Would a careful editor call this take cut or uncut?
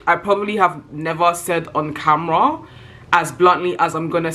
uncut